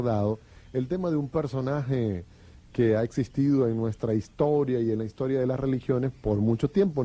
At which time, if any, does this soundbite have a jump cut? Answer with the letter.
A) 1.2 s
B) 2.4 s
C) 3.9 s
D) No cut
C